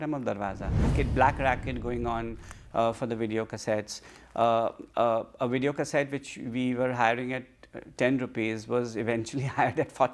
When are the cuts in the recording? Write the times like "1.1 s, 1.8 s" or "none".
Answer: 0.9 s